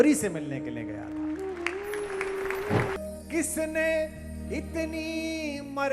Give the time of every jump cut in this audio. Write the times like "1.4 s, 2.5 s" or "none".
3.0 s